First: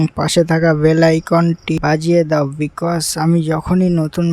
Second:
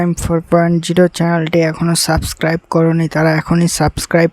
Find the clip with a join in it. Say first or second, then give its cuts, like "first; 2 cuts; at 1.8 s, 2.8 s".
first; 1 cut; at 1.8 s